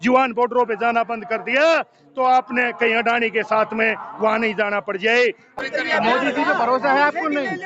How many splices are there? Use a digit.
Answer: 1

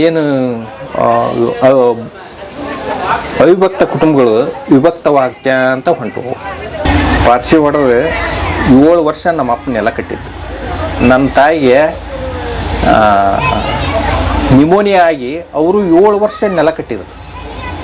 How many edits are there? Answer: 1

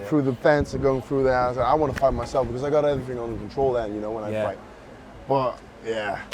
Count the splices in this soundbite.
0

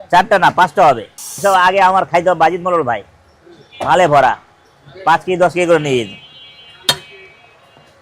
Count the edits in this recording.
1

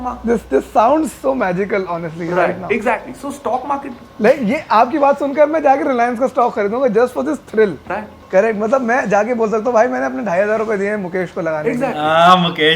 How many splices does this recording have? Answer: 1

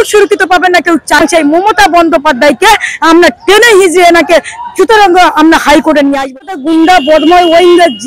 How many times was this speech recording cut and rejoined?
2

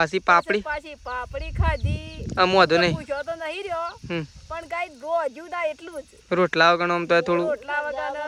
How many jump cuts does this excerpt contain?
0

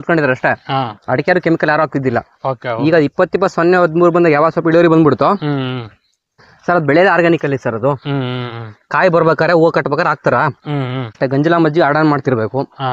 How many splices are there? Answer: 1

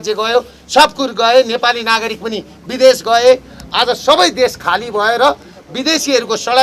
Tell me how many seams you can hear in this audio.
0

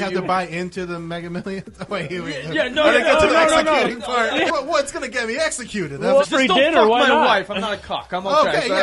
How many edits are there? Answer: 2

